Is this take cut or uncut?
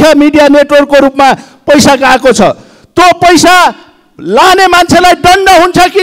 uncut